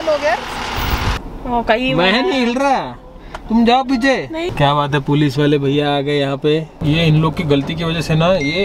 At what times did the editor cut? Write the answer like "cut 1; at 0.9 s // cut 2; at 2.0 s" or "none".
cut 1; at 1.1 s // cut 2; at 4.5 s // cut 3; at 6.7 s